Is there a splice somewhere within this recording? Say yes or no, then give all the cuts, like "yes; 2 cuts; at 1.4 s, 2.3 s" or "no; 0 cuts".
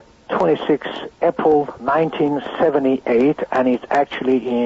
yes; 1 cut; at 1.9 s